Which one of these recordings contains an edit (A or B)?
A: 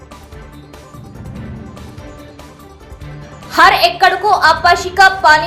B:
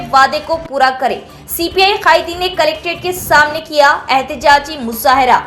A